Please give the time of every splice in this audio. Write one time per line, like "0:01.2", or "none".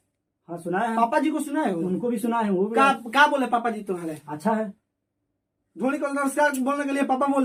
none